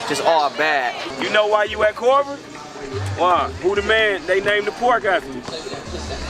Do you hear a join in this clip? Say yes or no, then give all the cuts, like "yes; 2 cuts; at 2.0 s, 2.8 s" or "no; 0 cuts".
yes; 1 cut; at 1.1 s